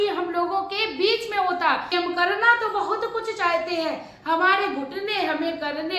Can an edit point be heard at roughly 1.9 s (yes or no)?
yes